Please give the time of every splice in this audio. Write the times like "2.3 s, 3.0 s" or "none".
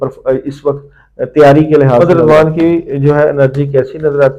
2.0 s